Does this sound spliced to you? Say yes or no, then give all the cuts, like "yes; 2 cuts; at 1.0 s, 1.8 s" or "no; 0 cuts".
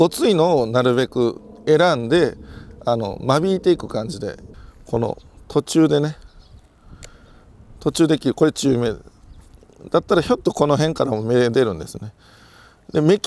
yes; 1 cut; at 4.4 s